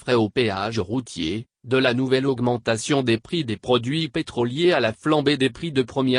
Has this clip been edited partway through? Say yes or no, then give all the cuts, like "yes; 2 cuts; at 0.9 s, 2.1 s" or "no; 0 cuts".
yes; 1 cut; at 4.8 s